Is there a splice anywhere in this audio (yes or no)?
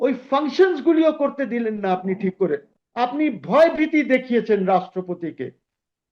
yes